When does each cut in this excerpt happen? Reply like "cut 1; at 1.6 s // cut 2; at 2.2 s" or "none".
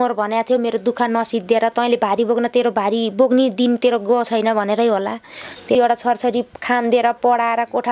cut 1; at 5.7 s